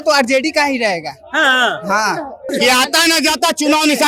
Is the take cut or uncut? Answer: cut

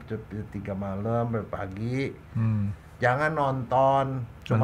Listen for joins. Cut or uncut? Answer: uncut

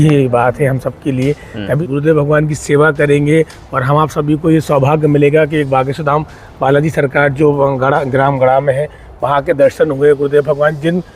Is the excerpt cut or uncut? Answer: cut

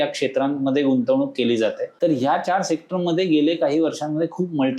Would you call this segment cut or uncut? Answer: cut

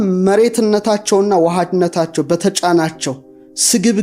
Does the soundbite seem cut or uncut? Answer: uncut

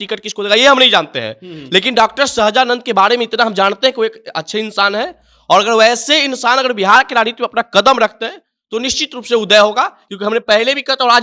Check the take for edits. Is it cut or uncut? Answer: uncut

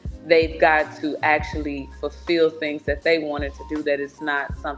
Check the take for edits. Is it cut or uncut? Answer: uncut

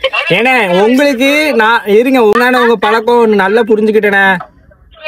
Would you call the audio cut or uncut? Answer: cut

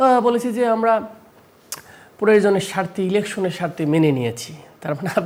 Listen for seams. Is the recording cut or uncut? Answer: uncut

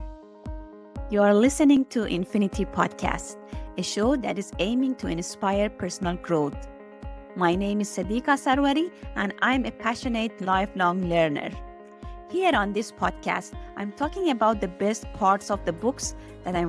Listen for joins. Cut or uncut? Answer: cut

